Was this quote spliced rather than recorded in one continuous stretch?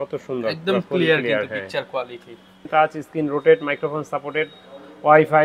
yes; 1 cut; at 2.5 s

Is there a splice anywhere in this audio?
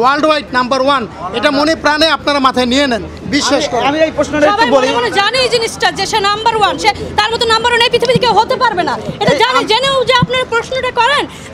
no; 0 cuts

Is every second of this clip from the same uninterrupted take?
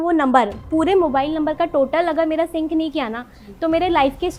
yes; 0 cuts

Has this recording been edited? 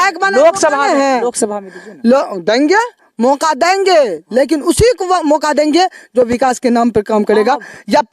no; 0 cuts

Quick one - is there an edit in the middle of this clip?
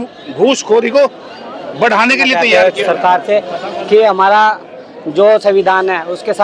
yes; 1 cut; at 2.4 s

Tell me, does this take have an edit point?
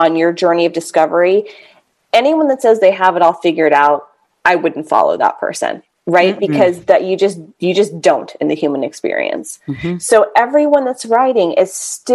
no; 0 cuts

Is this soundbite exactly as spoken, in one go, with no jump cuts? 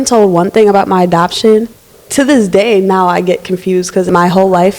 no; 2 cuts; at 1.7 s, 4.1 s

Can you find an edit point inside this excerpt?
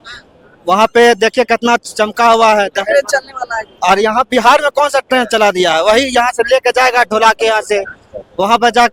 no; 0 cuts

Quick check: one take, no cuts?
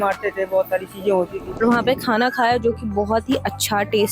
no; 1 cut; at 1.4 s

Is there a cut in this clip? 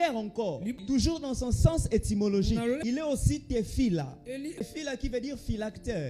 yes; 3 cuts; at 0.8 s, 3.0 s, 4.6 s

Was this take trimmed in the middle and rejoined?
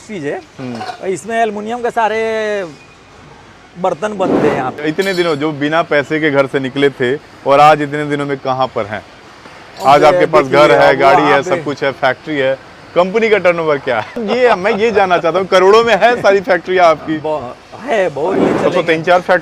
yes; 3 cuts; at 4.8 s, 14.2 s, 18.3 s

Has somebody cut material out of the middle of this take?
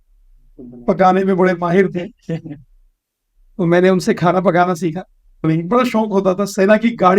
yes; 1 cut; at 5.4 s

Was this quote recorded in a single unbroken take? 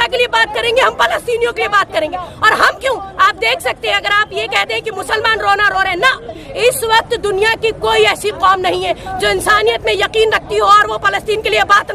yes; 0 cuts

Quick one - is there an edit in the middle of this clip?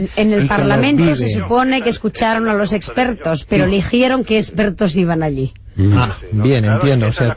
yes; 1 cut; at 5.6 s

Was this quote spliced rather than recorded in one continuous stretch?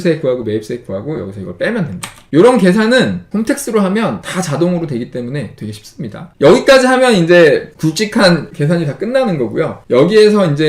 no; 0 cuts

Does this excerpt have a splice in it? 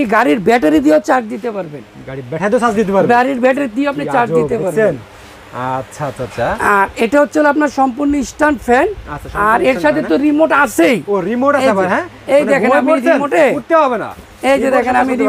no; 0 cuts

